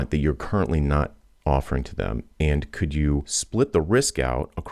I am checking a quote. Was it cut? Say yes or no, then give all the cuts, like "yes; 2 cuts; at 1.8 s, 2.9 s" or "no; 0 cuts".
yes; 1 cut; at 3.4 s